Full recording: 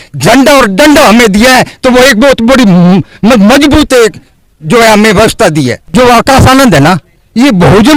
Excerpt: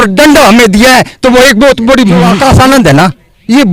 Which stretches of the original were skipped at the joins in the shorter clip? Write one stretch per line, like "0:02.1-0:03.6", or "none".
0:02.9-0:06.2